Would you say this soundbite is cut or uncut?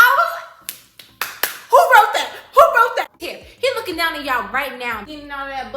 cut